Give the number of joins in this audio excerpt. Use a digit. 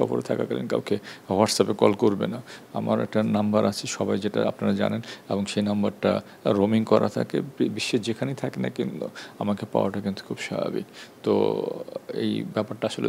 0